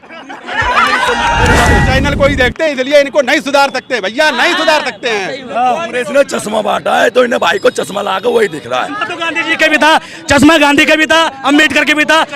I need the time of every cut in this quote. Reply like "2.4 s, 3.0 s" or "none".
1.8 s